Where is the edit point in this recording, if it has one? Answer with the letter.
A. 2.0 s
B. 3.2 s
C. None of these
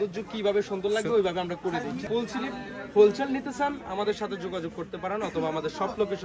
A